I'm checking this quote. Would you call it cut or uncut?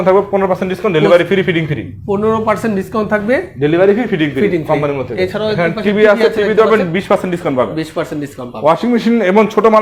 uncut